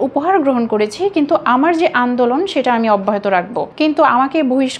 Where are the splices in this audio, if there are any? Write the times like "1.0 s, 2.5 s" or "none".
none